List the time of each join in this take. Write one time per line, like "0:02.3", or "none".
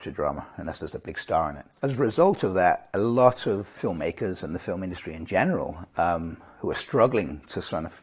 0:01.6
0:03.7